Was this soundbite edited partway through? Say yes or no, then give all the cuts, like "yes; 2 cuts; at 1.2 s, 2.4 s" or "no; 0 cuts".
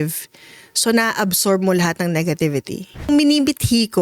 yes; 1 cut; at 3.1 s